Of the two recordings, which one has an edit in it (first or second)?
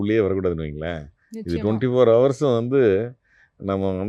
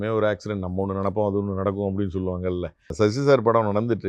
second